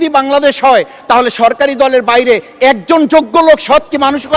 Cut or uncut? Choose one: uncut